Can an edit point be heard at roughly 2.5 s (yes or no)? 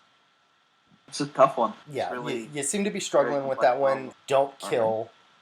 no